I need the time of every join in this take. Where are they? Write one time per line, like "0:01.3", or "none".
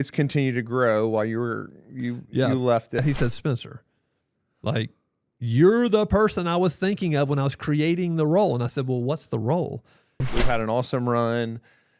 0:03.0
0:10.3

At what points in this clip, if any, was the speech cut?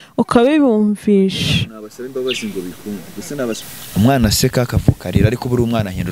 0:03.6

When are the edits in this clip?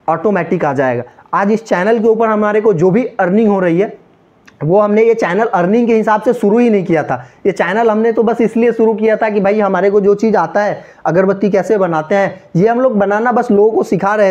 none

